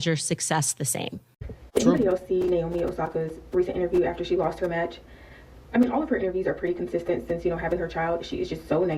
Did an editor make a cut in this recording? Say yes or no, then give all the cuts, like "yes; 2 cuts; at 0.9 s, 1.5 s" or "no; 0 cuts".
yes; 1 cut; at 1.5 s